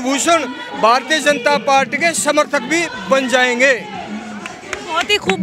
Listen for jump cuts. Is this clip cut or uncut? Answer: uncut